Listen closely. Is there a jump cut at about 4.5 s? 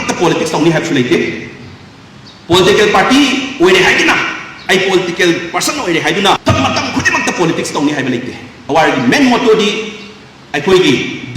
no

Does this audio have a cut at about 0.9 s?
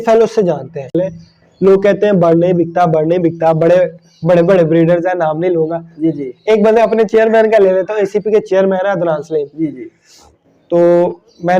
yes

